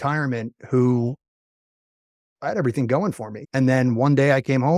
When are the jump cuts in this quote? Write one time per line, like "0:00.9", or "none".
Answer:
0:03.3